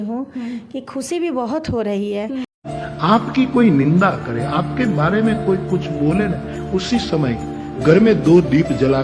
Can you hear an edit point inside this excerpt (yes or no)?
yes